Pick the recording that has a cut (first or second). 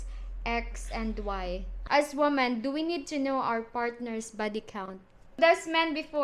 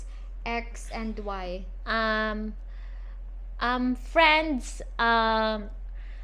first